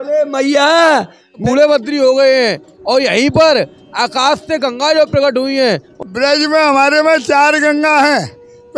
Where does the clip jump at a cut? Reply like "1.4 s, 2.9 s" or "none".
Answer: 1.4 s, 5.9 s